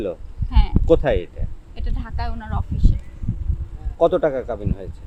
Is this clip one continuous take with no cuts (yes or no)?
yes